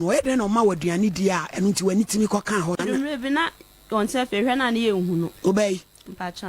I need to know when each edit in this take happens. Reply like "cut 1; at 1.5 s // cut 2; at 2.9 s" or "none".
cut 1; at 2.8 s